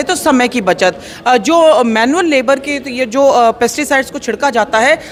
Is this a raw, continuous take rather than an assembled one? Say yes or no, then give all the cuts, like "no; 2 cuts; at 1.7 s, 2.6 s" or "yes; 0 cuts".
yes; 0 cuts